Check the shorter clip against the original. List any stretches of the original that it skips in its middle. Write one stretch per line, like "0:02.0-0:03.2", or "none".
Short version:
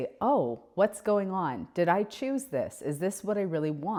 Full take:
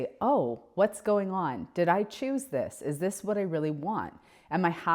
none